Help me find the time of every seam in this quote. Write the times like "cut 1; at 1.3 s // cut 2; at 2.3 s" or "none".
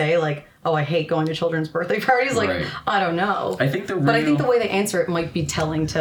none